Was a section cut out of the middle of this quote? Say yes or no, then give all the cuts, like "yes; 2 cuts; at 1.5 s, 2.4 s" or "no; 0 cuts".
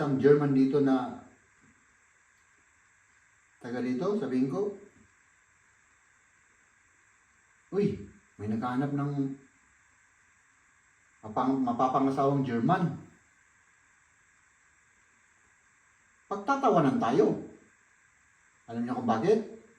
no; 0 cuts